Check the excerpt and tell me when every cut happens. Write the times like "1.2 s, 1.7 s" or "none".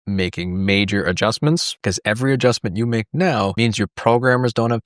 1.7 s, 3.5 s